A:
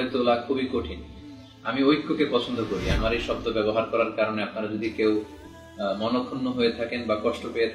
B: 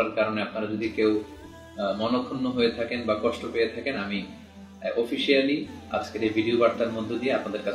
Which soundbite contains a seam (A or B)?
A